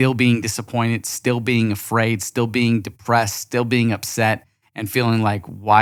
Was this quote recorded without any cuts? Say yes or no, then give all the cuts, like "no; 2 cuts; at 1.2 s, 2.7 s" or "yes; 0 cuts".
yes; 0 cuts